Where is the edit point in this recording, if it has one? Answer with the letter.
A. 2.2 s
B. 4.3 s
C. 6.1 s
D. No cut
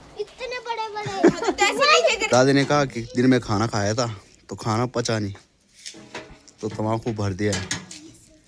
A